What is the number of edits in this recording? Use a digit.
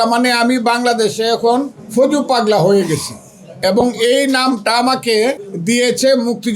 2